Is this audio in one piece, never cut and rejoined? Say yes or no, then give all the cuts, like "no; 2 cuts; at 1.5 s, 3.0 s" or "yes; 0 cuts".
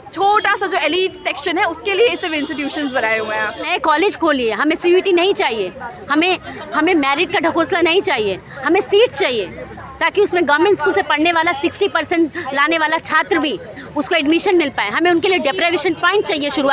no; 1 cut; at 3.7 s